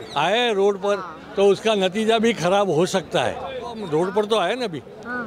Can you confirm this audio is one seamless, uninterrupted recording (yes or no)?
no